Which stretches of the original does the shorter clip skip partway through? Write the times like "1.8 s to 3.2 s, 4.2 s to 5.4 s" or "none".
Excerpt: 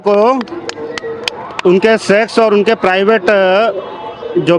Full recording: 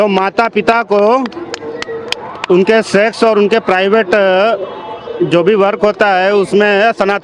none